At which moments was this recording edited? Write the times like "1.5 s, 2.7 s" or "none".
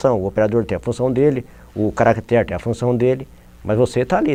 none